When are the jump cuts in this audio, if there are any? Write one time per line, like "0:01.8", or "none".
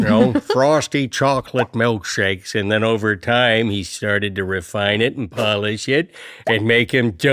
none

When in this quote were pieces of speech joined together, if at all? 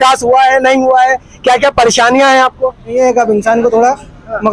0:02.9

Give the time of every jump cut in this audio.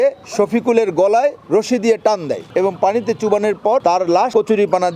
0:02.5
0:04.0

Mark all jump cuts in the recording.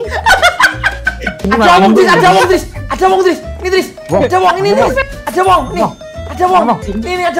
0:01.3

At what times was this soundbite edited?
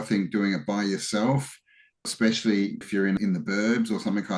0:02.1
0:03.1

